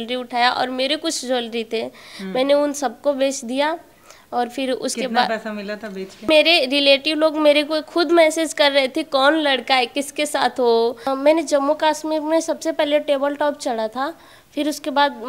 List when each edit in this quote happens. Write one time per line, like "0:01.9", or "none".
0:06.3
0:11.1